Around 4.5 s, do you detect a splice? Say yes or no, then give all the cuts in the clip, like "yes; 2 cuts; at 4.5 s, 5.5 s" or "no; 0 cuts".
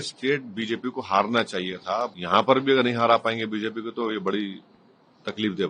no; 1 cut; at 2.2 s